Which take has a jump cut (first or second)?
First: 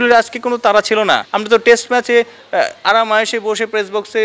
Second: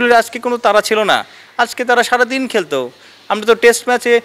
first